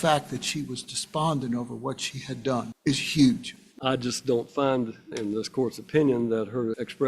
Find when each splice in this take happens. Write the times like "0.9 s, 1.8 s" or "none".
2.7 s, 3.8 s